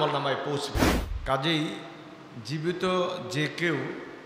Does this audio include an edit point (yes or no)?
yes